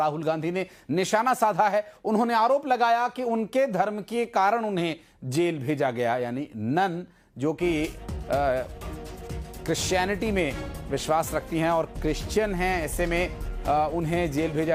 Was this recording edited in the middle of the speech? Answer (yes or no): no